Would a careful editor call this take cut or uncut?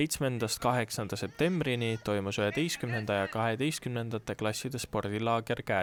uncut